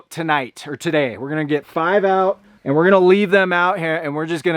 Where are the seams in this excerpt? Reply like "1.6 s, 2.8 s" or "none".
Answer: 2.5 s